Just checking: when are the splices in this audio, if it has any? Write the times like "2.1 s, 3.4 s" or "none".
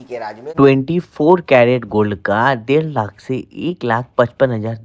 none